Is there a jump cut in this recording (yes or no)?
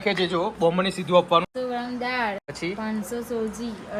yes